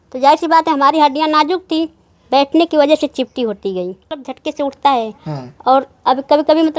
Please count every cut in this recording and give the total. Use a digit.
1